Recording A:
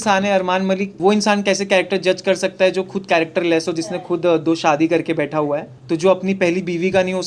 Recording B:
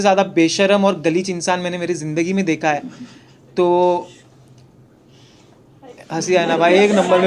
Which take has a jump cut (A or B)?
A